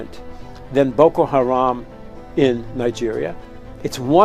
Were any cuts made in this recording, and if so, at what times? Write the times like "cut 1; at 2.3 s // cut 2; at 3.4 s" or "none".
none

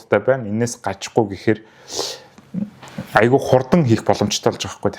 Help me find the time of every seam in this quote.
none

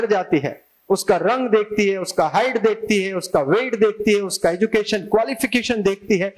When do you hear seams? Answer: none

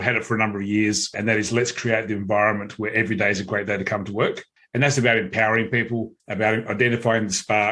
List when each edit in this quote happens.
cut 1; at 1.1 s // cut 2; at 4.5 s // cut 3; at 6.2 s

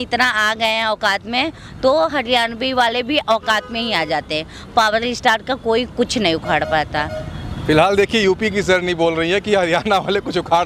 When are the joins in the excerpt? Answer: none

